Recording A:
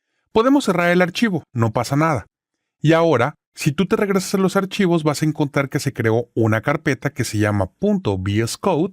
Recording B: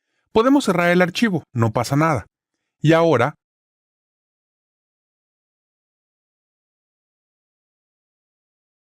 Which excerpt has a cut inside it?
A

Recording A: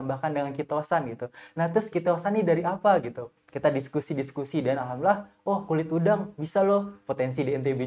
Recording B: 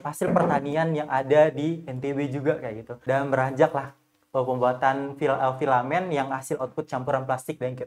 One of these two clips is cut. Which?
B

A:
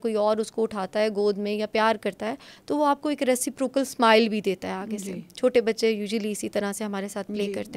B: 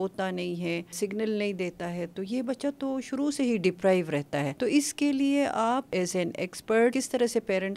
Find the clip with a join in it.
B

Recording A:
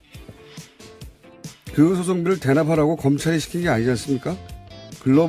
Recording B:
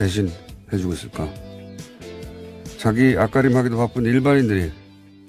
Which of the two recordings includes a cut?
A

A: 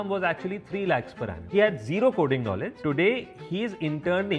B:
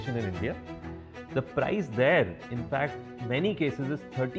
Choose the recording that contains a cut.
A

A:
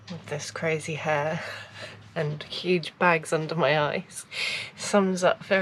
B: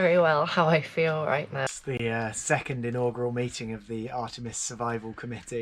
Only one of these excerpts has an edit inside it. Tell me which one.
B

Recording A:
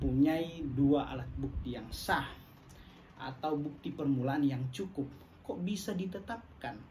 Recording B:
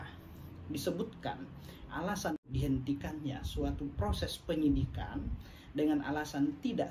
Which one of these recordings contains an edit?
B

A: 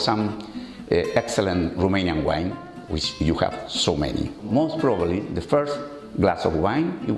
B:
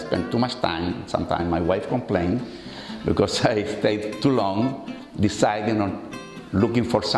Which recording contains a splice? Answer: A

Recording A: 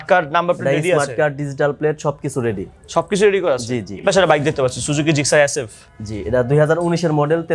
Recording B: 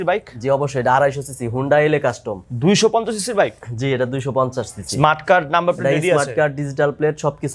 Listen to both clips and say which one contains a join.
A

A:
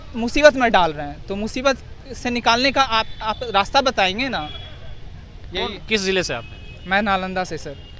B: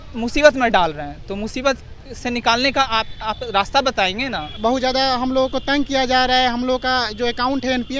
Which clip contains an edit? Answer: B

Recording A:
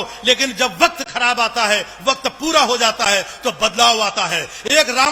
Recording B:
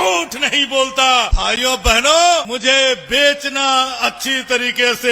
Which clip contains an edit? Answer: B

